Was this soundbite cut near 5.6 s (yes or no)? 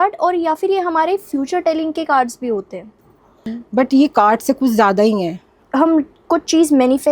yes